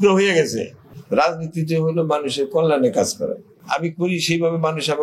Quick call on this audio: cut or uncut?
cut